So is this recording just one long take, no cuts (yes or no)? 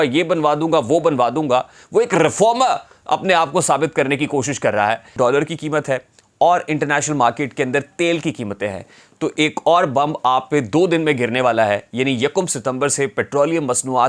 no